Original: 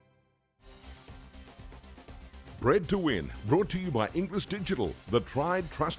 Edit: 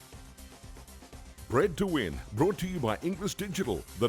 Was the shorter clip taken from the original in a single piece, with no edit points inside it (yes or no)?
no